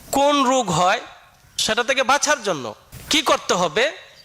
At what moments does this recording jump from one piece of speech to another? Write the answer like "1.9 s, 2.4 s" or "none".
1.6 s, 2.6 s